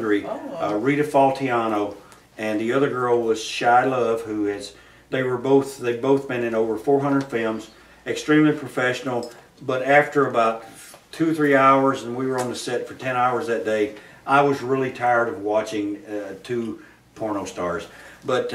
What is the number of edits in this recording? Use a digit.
0